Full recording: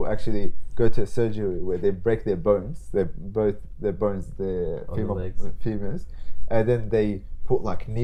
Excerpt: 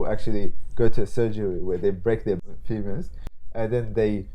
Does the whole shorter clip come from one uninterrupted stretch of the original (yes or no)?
no